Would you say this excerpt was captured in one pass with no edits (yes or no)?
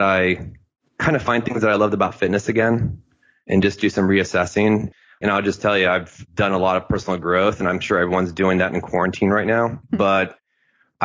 no